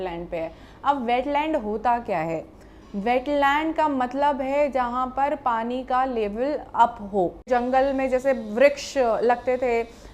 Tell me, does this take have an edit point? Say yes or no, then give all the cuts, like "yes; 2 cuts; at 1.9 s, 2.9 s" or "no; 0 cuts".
yes; 1 cut; at 7.5 s